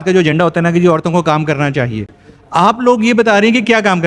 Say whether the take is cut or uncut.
uncut